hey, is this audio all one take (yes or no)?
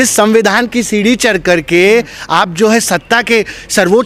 yes